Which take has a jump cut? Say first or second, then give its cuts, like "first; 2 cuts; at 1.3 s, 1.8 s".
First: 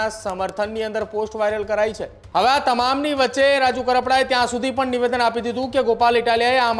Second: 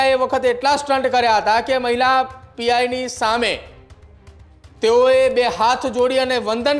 first; 1 cut; at 2.1 s